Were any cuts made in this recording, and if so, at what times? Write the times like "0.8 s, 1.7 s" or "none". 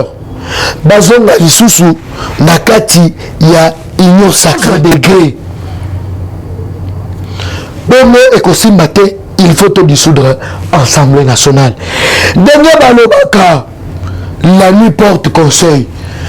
4.6 s